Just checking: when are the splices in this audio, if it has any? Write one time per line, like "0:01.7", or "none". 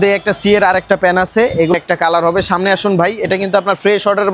0:01.7